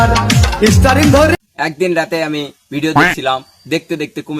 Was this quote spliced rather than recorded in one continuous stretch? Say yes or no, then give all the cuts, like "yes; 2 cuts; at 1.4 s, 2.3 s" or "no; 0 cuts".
yes; 1 cut; at 1.3 s